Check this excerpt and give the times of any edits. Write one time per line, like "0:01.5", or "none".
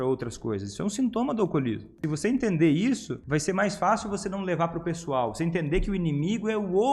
0:01.9
0:03.1